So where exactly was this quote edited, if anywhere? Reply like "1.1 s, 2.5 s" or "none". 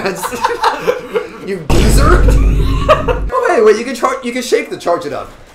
3.2 s